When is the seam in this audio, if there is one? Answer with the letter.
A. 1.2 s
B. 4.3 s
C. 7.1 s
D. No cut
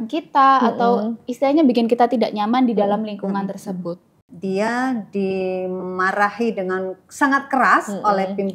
B